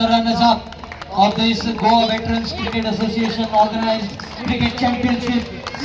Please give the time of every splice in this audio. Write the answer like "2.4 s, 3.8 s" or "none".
none